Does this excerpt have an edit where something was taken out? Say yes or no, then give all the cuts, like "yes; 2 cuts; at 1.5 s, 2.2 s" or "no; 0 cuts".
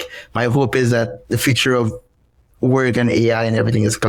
no; 0 cuts